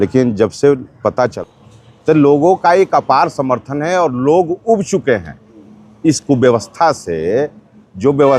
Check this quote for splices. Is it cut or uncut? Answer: cut